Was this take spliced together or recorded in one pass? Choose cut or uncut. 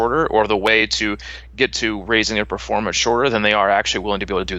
uncut